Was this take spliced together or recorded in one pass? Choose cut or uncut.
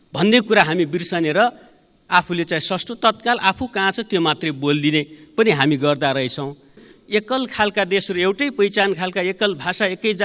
cut